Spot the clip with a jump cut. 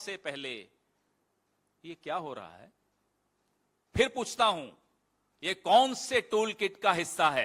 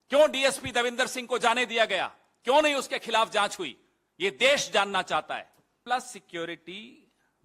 second; 1 cut; at 5.8 s

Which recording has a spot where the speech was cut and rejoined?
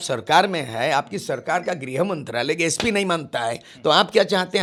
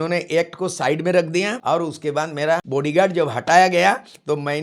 second; 2 cuts; at 1.6 s, 2.6 s

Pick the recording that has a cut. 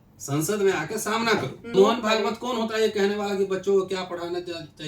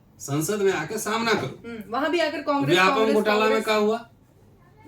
first; 1 cut; at 1.7 s

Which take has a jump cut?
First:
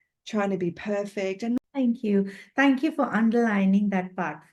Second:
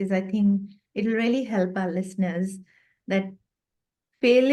first; 1 cut; at 1.6 s

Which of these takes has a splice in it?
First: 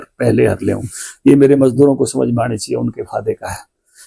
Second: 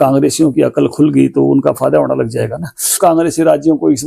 second; 1 cut; at 3.0 s

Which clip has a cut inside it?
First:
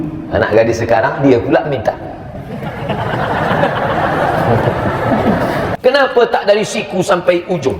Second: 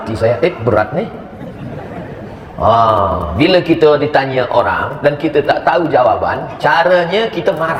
first; 1 cut; at 5.7 s

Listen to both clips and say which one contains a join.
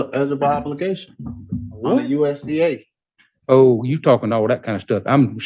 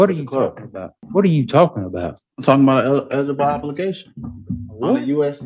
second; 1 cut; at 1.0 s

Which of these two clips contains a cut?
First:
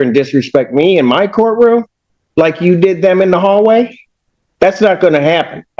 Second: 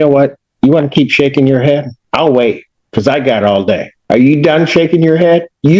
second; 2 cuts; at 2.0 s, 3.9 s

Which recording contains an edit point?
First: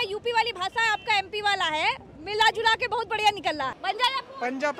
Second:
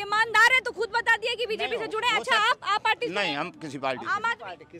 first; 1 cut; at 3.8 s

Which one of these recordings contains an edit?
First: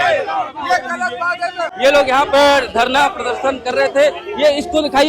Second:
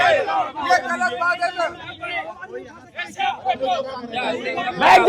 first; 1 cut; at 1.7 s

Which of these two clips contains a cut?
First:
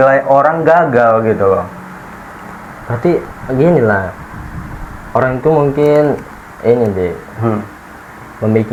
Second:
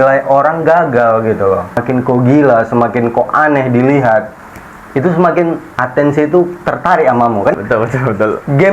second; 2 cuts; at 1.8 s, 7.5 s

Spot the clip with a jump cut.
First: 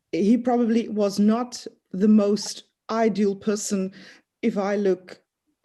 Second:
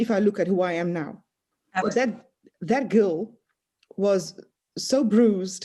second; 1 cut; at 1.8 s

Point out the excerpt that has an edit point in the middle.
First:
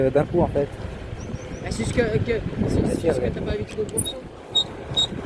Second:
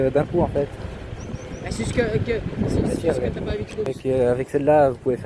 second; 1 cut; at 3.9 s

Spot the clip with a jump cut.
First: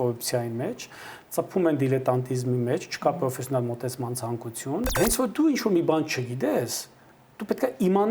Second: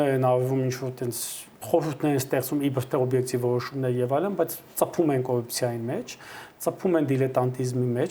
first; 1 cut; at 4.9 s

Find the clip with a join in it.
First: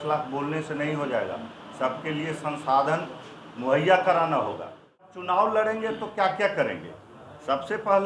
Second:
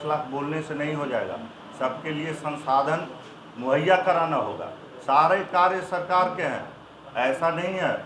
first; 1 cut; at 5.0 s

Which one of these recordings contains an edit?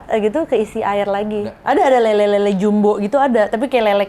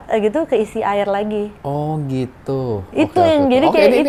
first; 1 cut; at 1.6 s

